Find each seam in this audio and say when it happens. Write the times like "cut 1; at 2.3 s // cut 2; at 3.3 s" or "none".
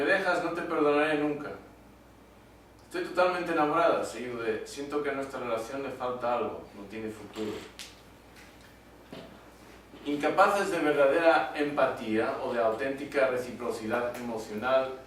none